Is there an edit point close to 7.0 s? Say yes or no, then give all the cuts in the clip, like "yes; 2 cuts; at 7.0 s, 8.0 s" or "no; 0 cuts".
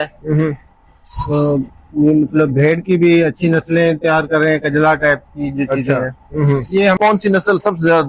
yes; 1 cut; at 7.0 s